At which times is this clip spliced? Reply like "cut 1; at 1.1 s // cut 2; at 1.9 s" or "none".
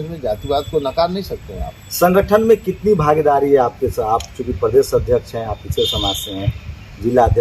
none